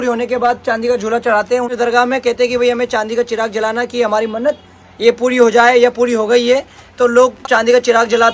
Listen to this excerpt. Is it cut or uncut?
cut